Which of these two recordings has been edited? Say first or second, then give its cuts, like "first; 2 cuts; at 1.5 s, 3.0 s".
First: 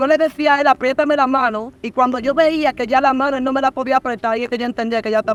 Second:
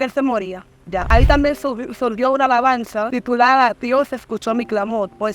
second; 2 cuts; at 1.0 s, 3.1 s